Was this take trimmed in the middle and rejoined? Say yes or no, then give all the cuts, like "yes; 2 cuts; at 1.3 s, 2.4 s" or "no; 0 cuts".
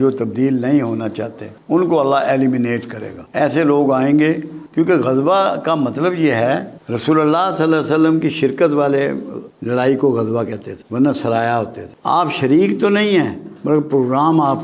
no; 0 cuts